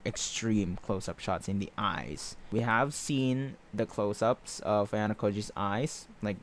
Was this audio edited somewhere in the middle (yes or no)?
yes